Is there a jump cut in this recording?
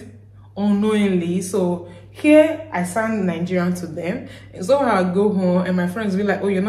no; 0 cuts

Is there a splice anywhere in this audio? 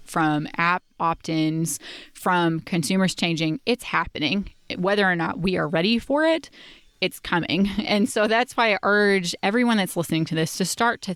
no; 0 cuts

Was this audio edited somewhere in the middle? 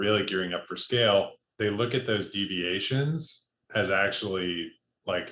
yes; 1 cut; at 1.4 s

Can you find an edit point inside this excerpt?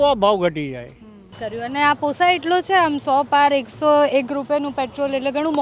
yes; 1 cut; at 1.3 s

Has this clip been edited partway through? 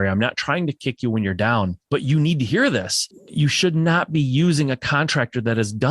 yes; 2 cuts; at 1.8 s, 3.2 s

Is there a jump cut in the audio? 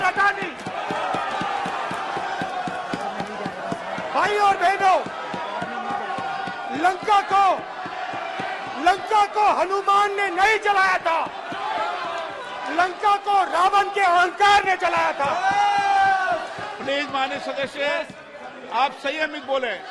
no; 0 cuts

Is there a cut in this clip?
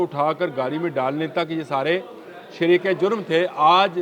no; 0 cuts

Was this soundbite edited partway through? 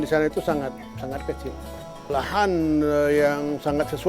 yes; 1 cut; at 2.1 s

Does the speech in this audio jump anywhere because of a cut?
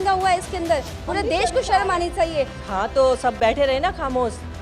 yes; 1 cut; at 2.6 s

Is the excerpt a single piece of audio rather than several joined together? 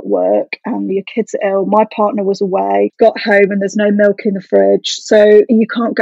yes; 0 cuts

